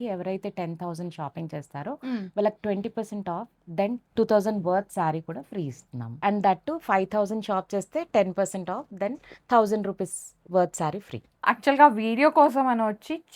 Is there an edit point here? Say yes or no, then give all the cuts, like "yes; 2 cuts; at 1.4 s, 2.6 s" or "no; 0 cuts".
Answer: yes; 2 cuts; at 6.1 s, 11.4 s